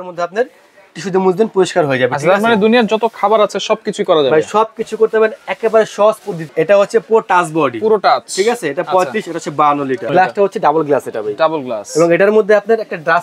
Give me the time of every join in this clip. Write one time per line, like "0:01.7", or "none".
0:06.4
0:10.1